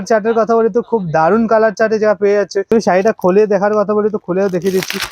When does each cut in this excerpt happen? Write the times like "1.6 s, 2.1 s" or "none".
2.7 s